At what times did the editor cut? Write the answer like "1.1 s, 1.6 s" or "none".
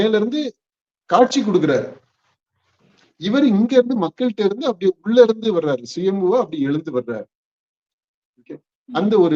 none